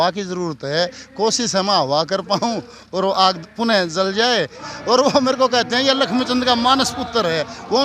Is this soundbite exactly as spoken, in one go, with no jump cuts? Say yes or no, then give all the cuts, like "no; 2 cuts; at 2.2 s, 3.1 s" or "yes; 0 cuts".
no; 1 cut; at 4.6 s